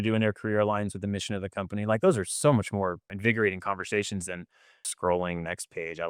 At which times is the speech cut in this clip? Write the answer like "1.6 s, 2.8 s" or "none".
none